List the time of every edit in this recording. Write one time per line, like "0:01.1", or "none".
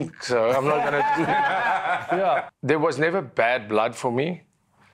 0:02.5